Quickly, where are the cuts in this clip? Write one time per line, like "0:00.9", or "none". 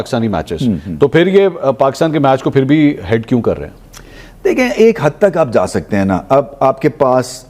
none